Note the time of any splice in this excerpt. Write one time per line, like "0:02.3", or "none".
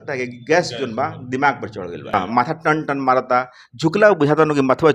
0:02.1